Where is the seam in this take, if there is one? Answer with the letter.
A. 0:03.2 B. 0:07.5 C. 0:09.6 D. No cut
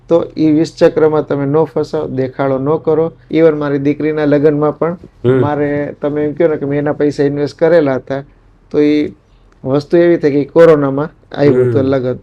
A